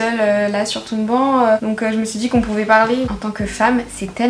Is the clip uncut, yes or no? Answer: no